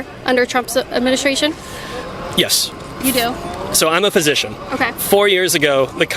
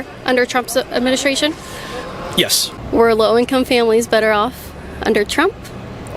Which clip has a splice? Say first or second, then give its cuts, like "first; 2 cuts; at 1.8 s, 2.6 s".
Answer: second; 1 cut; at 2.7 s